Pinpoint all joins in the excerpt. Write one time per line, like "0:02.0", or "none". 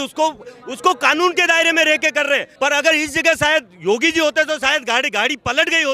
0:02.5